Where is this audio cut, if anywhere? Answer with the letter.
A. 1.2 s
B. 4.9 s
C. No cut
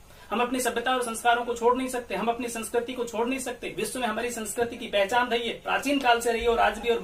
C